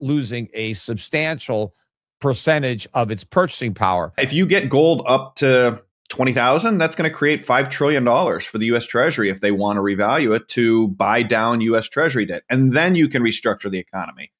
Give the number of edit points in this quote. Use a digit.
1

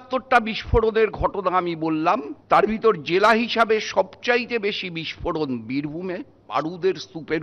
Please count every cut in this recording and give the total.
2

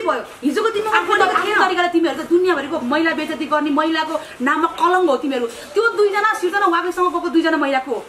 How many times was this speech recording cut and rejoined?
1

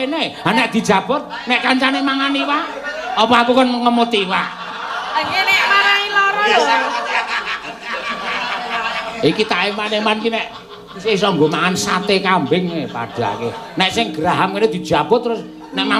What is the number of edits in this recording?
1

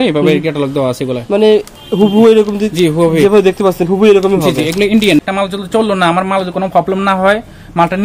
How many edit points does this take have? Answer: 1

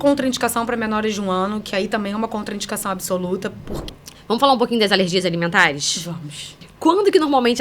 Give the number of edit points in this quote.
2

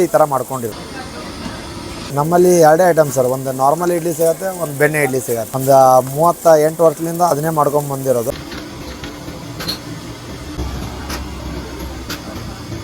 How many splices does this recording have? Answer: 4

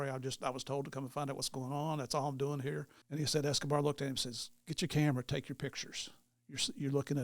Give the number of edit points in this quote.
1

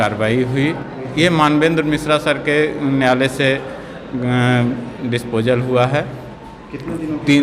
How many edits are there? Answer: 1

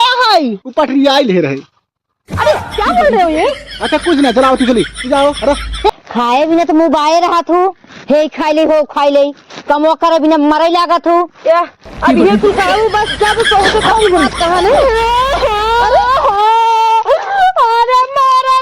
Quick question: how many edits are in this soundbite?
1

